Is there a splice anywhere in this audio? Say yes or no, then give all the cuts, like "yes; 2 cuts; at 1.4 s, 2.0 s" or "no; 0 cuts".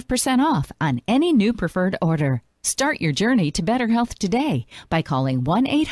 no; 0 cuts